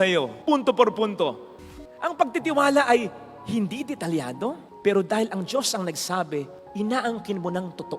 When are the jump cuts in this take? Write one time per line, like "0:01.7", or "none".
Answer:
0:01.6